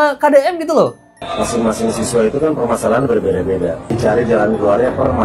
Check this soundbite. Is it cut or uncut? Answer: cut